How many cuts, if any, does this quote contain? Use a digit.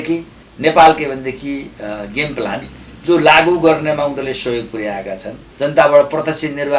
1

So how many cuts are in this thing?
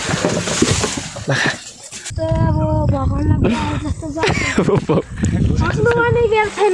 1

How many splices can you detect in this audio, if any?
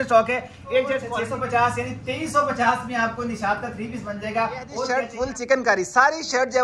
2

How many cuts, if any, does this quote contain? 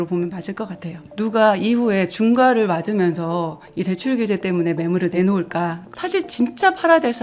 2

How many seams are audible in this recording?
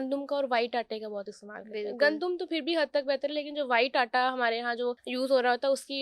1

